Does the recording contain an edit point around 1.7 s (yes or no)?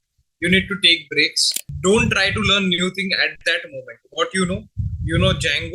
yes